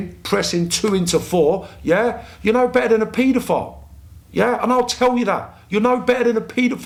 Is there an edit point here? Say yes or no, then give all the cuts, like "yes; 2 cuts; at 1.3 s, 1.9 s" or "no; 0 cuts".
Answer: no; 0 cuts